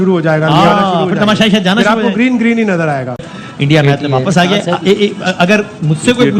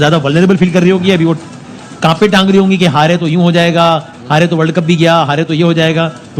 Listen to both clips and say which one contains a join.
first; 1 cut; at 3.2 s

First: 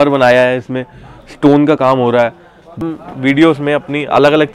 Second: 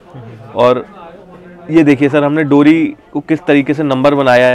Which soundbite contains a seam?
first; 1 cut; at 2.8 s

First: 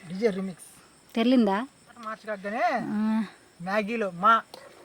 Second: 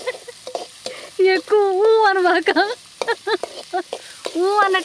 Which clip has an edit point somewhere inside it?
first; 1 cut; at 2.3 s

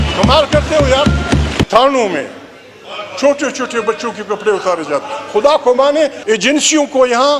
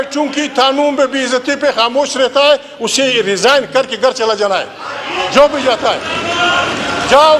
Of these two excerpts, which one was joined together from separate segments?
first; 2 cuts; at 1.7 s, 6.4 s

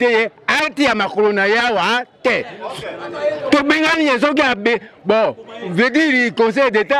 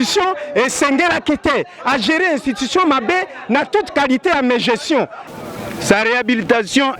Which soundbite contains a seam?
second; 1 cut; at 5.2 s

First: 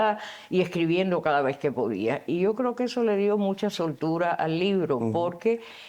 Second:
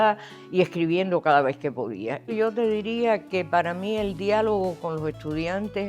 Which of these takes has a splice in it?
second; 1 cut; at 2.3 s

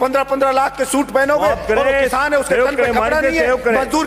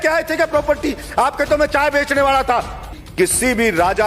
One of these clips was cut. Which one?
second; 1 cut; at 3.0 s

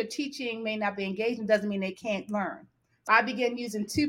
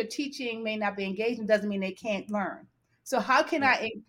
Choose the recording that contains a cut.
first; 1 cut; at 3.1 s

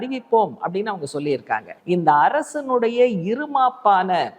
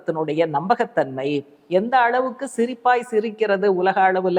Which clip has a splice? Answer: first; 1 cut; at 1.7 s

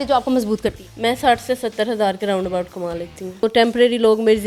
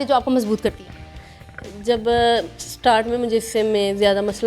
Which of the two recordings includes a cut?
first; 2 cuts; at 0.9 s, 3.5 s

